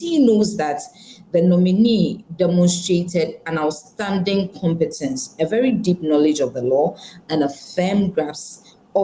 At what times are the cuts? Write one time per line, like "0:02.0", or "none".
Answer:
none